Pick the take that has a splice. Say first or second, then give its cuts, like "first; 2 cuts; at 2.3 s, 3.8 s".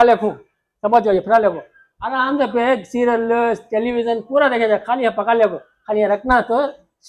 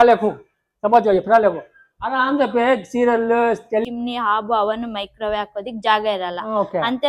second; 1 cut; at 3.9 s